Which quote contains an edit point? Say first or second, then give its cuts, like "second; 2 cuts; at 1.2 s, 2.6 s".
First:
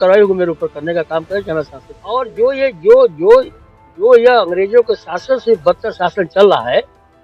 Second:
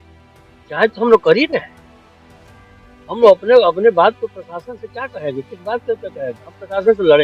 first; 1 cut; at 2.3 s